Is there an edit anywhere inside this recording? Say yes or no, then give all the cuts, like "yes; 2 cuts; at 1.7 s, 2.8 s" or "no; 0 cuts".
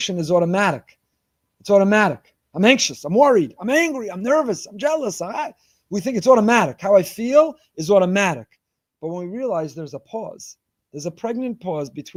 no; 0 cuts